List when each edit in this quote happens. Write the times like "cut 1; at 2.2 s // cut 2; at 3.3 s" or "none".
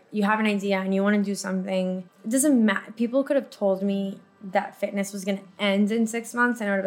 cut 1; at 2.1 s